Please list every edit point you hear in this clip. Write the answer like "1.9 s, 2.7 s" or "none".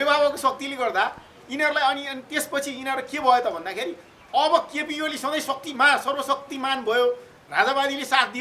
none